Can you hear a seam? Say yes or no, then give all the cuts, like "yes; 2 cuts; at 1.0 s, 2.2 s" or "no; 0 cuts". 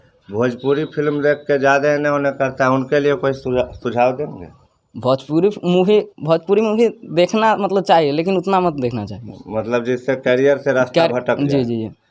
no; 0 cuts